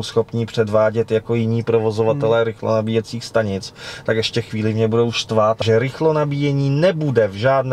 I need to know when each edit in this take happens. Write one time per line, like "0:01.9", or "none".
0:05.6